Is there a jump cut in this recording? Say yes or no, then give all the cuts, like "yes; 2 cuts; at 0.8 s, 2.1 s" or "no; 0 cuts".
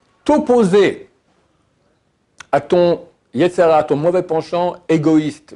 no; 0 cuts